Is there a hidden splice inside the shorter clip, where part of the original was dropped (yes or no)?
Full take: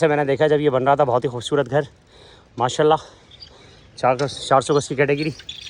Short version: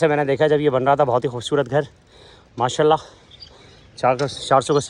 no